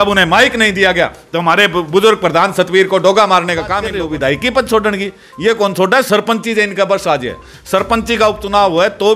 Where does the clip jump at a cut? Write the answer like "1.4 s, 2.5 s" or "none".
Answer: 3.8 s